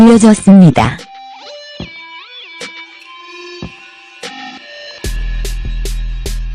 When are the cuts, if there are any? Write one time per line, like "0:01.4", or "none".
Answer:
0:04.1